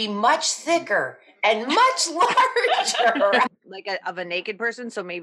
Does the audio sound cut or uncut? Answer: cut